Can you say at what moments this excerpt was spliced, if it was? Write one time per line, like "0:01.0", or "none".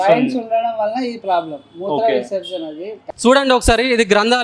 0:02.9

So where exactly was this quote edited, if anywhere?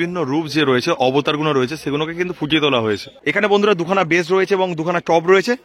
0:03.1

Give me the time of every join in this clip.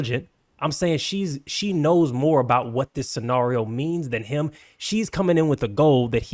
none

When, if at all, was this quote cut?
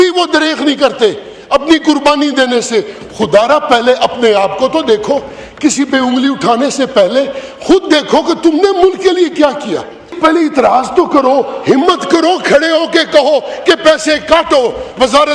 0:10.1

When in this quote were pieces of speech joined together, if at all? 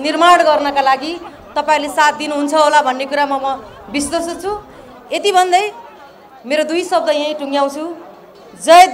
none

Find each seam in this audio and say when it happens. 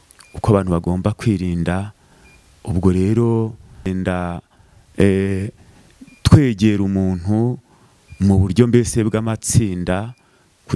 0:03.9

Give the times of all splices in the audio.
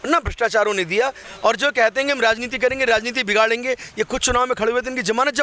0:01.2

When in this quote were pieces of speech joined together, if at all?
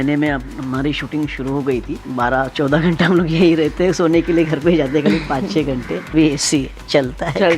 0:02.0
0:06.1

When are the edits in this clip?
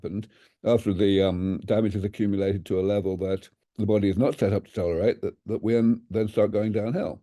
none

